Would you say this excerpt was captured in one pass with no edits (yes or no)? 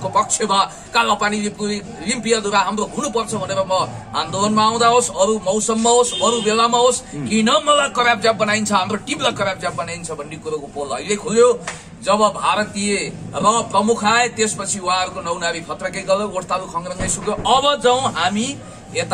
yes